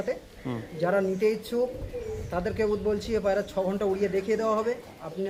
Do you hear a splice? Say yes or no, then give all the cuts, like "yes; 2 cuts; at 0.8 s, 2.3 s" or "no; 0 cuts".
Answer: no; 0 cuts